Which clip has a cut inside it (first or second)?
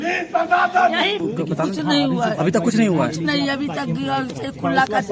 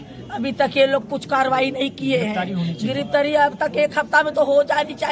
first